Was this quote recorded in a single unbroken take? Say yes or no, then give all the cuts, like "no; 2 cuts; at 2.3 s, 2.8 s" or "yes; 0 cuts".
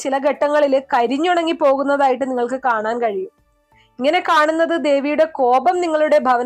yes; 0 cuts